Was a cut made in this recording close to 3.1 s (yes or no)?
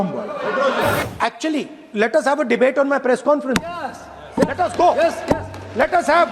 no